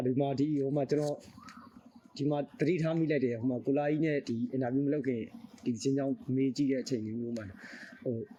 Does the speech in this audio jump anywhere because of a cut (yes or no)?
no